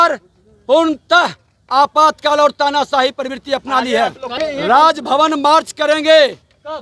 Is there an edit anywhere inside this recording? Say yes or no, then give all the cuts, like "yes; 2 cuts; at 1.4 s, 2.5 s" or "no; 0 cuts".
yes; 1 cut; at 4.3 s